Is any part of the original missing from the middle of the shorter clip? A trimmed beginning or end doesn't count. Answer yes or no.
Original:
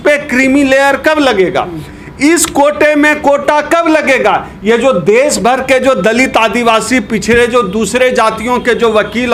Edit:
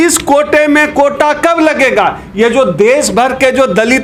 no